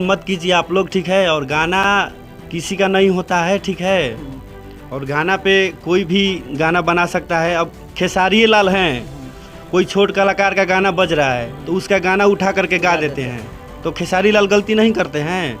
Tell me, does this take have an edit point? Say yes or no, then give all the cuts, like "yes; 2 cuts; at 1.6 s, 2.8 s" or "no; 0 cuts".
no; 0 cuts